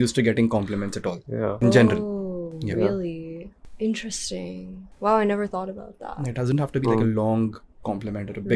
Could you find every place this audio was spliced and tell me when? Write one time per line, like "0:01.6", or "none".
none